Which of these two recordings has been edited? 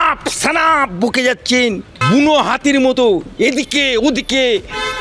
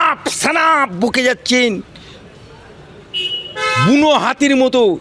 first; 1 cut; at 1.9 s

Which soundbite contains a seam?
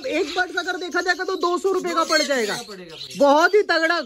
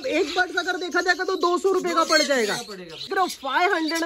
second; 1 cut; at 3.1 s

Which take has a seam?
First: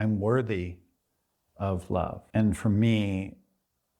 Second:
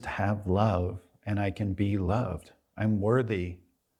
first; 1 cut; at 2.2 s

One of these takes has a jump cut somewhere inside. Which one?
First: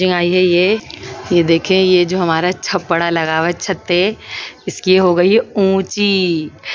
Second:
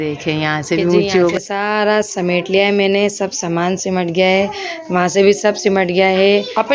second; 1 cut; at 1.3 s

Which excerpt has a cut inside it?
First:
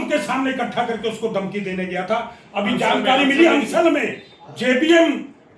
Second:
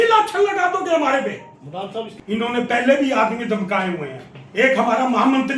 second; 1 cut; at 2.2 s

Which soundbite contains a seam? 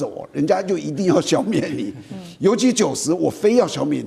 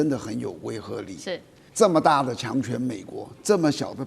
second; 1 cut; at 1.6 s

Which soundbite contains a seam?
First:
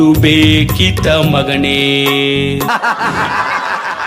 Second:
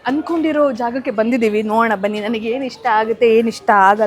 first; 1 cut; at 2.7 s

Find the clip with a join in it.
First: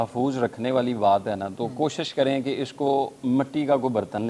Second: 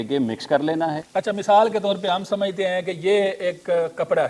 second; 1 cut; at 1.0 s

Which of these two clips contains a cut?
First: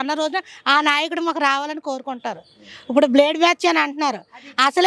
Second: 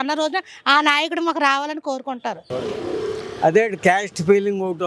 second; 1 cut; at 2.5 s

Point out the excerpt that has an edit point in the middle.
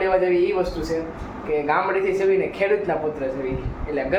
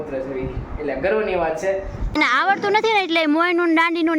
second; 1 cut; at 2.2 s

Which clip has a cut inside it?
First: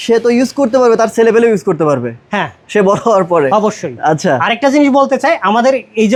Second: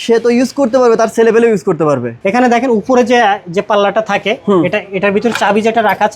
second; 1 cut; at 2.1 s

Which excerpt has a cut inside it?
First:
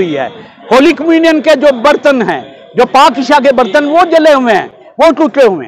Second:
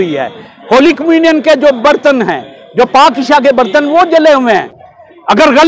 second; 1 cut; at 4.8 s

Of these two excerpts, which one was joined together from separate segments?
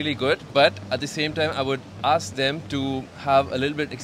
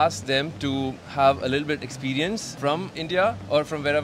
second; 1 cut; at 2.9 s

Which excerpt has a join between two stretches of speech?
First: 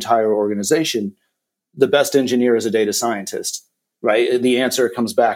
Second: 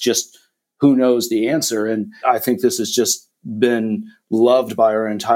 second; 1 cut; at 2.2 s

